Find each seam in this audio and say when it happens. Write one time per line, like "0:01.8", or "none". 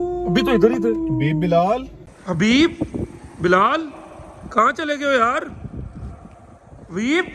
0:02.2